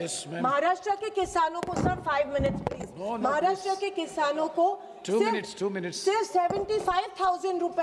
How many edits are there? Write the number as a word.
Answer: zero